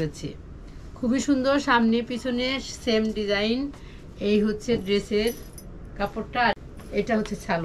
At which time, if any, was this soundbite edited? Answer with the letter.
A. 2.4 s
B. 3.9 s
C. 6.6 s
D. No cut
C